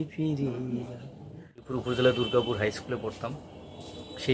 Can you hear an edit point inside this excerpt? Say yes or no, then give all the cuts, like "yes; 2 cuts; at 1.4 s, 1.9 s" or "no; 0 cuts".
yes; 1 cut; at 1.5 s